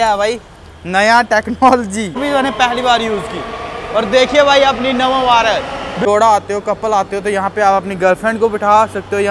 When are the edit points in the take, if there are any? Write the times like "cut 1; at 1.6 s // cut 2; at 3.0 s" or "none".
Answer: cut 1; at 2.2 s // cut 2; at 5.9 s

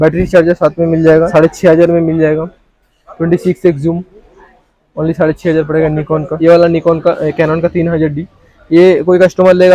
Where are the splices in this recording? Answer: cut 1; at 1.3 s // cut 2; at 6.3 s

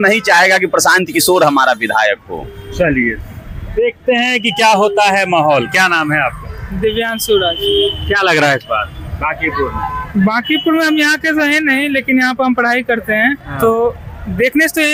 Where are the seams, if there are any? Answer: none

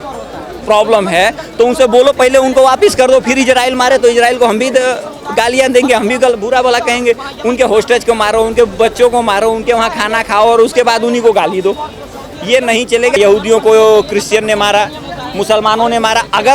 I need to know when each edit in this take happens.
cut 1; at 13.1 s

